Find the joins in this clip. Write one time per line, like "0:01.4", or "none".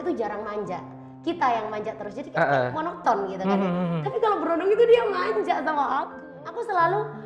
0:06.2